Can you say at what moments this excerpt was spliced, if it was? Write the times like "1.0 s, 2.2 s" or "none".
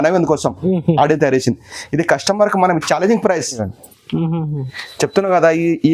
3.6 s